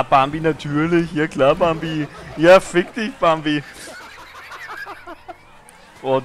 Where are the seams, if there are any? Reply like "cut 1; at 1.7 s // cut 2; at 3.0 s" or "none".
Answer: none